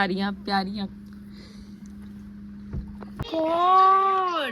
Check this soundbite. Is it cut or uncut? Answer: cut